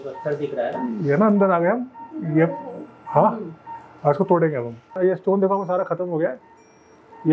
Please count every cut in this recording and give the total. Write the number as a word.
one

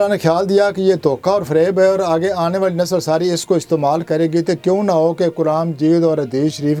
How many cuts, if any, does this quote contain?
zero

